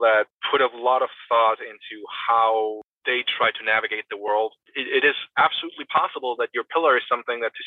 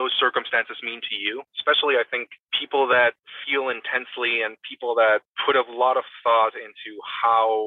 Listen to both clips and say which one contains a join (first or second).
second